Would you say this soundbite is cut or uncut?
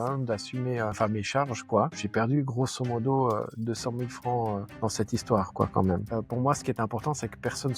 cut